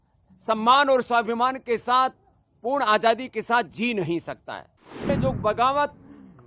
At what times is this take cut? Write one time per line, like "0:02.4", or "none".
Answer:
0:05.1